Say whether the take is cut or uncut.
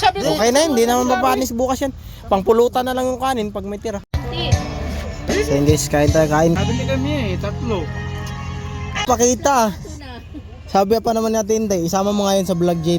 cut